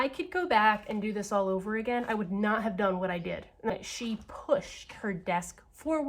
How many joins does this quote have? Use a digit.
1